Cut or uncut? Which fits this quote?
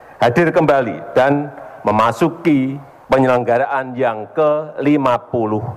cut